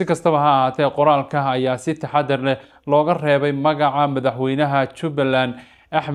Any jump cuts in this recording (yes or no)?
no